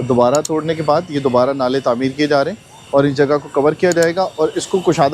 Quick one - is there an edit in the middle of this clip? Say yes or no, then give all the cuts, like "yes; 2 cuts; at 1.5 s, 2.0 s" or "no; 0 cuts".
no; 0 cuts